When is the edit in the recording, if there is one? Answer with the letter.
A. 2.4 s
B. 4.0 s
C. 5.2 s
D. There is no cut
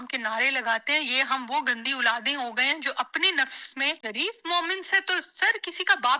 B